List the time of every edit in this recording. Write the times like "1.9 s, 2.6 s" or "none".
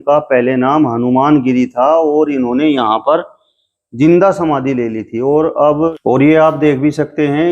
6.0 s